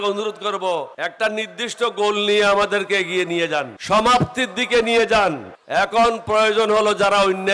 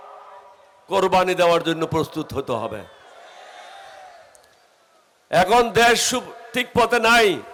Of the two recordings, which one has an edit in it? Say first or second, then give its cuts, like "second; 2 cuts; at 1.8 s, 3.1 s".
first; 3 cuts; at 0.9 s, 3.8 s, 5.5 s